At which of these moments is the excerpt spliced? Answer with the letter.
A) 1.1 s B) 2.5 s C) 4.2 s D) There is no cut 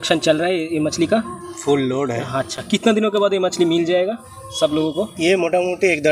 D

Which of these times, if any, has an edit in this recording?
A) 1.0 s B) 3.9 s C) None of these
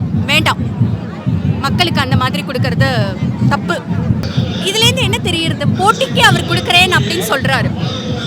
C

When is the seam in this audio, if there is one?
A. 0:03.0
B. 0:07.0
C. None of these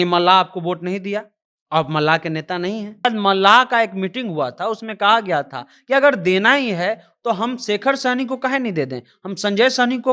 A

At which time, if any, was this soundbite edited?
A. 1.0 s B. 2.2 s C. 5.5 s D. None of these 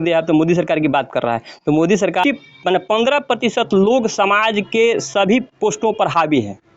B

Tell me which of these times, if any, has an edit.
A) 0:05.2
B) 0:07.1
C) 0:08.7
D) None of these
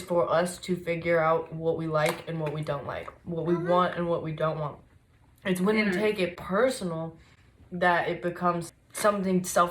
C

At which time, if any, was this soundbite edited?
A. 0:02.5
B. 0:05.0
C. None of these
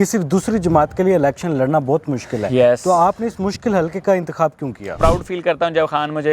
B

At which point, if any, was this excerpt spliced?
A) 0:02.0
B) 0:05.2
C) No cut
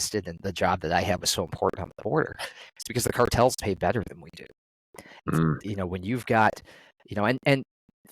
B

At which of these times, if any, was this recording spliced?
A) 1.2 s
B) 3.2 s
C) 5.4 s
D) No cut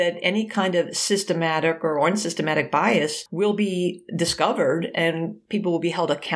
B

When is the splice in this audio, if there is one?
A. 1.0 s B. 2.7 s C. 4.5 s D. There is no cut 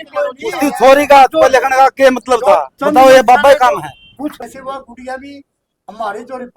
C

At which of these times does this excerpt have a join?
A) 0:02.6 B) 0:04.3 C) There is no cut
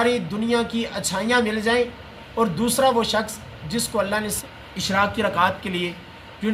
B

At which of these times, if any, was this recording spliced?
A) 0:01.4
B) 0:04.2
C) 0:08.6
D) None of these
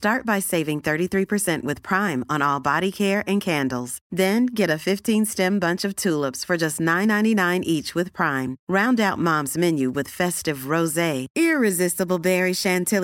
D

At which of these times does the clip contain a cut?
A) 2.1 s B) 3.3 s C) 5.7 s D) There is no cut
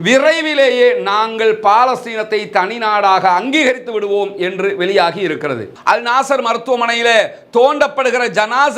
C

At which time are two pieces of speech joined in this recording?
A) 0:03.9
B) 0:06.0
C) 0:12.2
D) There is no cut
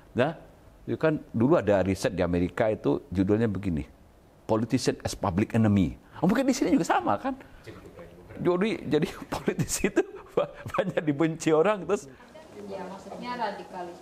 C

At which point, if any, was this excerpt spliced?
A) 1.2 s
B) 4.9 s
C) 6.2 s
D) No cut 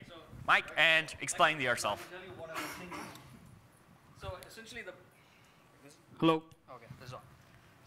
A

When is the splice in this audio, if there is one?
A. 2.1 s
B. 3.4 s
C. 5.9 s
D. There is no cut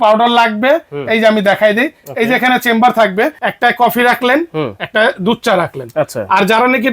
B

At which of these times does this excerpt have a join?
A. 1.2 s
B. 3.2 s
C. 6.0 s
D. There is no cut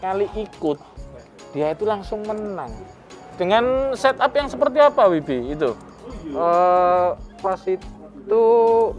B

